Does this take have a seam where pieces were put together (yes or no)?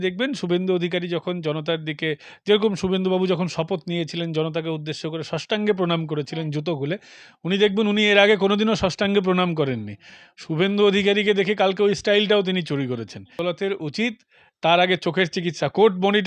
yes